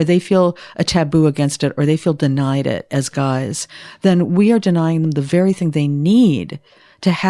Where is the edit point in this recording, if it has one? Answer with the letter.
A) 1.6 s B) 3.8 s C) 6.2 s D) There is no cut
D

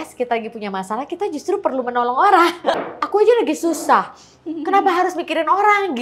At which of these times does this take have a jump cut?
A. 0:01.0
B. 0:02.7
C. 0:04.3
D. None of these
B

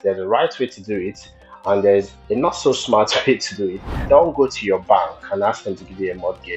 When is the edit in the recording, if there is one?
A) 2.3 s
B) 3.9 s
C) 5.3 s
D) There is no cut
B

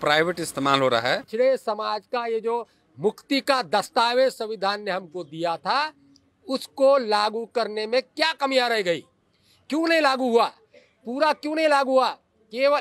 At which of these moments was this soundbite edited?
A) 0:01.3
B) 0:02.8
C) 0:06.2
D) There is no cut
A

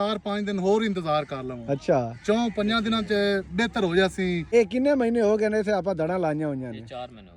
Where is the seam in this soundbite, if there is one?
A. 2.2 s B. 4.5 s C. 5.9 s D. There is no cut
B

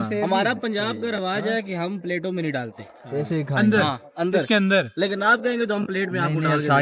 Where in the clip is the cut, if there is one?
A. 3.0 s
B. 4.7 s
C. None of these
C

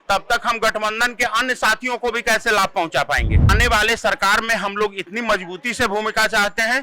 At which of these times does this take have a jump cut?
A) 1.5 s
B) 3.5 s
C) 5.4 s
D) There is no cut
B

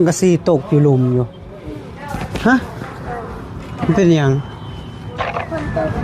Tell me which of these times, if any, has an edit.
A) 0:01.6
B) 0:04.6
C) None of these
C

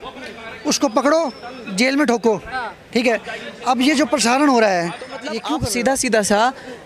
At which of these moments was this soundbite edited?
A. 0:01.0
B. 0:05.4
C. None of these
B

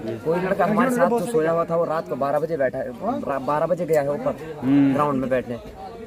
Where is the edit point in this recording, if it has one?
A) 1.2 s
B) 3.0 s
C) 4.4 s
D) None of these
D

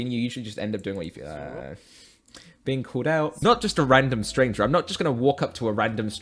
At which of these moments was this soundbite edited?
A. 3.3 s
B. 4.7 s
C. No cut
A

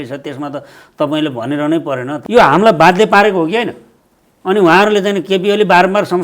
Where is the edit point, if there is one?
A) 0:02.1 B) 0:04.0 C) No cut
A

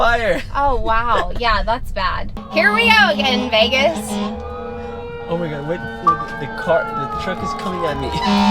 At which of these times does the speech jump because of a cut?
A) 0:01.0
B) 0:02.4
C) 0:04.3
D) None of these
B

